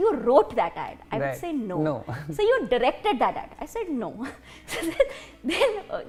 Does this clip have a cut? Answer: no; 0 cuts

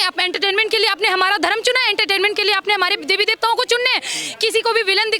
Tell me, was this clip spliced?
no; 0 cuts

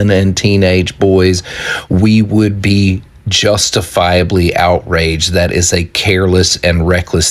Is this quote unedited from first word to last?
yes; 0 cuts

